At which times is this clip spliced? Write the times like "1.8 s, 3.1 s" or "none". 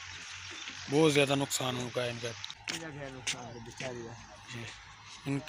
2.5 s